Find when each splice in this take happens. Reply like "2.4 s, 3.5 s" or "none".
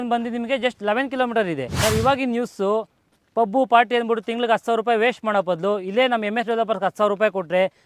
1.7 s